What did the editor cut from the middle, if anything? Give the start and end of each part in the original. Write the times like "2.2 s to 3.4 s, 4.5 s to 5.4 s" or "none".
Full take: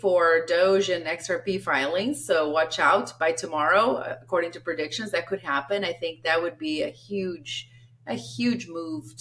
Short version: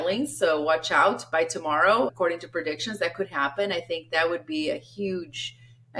4.0 s to 4.3 s